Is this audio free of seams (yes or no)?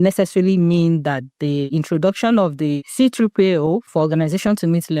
no